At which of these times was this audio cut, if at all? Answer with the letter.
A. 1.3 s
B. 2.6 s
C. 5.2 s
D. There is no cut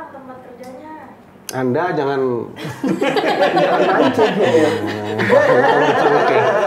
A